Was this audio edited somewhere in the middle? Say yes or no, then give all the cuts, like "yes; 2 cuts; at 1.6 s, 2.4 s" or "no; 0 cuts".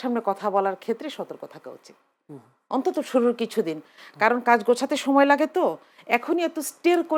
no; 0 cuts